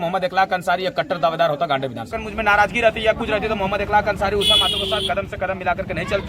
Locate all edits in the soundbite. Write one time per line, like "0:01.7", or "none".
0:02.2